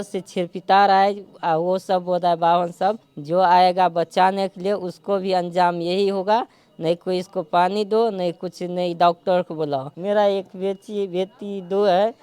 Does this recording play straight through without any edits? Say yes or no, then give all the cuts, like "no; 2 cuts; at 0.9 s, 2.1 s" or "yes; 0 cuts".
no; 2 cuts; at 3.1 s, 9.9 s